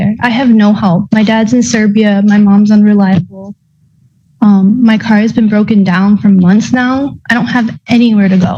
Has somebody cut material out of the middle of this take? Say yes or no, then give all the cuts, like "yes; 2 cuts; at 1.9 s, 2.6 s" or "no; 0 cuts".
no; 0 cuts